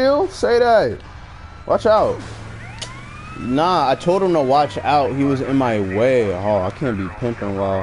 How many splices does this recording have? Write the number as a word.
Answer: zero